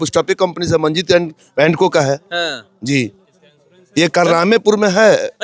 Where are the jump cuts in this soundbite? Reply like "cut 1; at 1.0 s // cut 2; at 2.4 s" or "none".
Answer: none

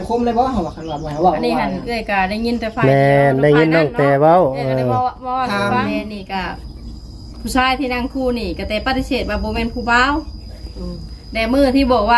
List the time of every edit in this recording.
cut 1; at 6.1 s

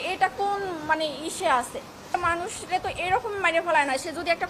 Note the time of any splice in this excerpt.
cut 1; at 2.1 s

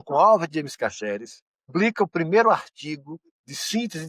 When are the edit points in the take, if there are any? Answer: cut 1; at 1.7 s

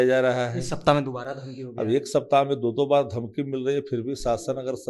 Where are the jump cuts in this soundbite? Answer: none

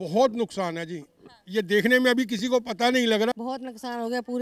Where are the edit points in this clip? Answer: cut 1; at 3.3 s

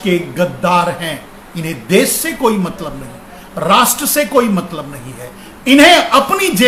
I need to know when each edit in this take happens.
none

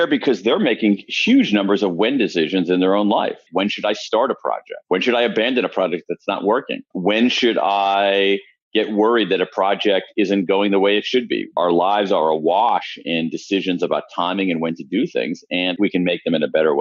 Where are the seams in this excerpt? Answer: cut 1; at 3.4 s // cut 2; at 6.8 s // cut 3; at 11.5 s // cut 4; at 15.7 s

